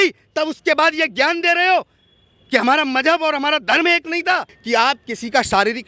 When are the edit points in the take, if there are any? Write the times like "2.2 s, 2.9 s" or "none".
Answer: 4.5 s